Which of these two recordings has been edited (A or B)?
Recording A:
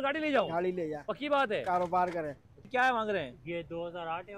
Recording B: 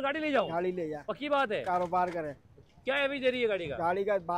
A